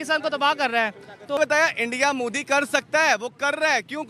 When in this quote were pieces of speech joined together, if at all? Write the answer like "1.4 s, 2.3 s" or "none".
1.4 s